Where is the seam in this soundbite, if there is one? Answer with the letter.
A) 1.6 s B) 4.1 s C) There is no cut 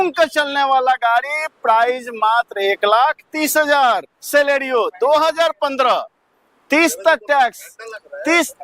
B